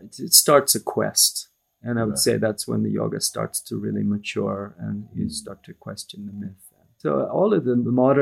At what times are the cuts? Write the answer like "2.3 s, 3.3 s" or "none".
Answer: 7.0 s